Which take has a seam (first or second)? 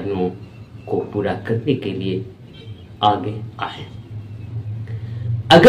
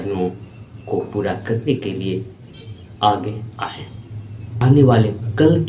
second